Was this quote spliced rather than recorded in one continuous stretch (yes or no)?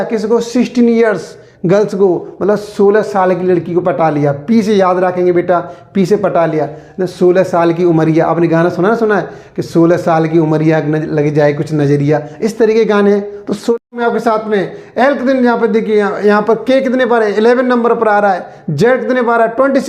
yes